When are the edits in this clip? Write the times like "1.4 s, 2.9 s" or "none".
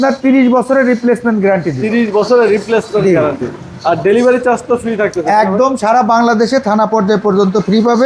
none